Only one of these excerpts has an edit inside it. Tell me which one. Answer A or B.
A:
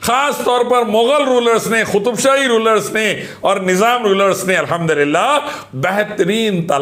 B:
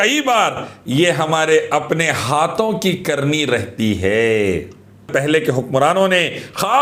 B